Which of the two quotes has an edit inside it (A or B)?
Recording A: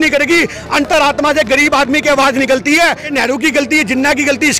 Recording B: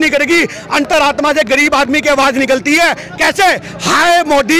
A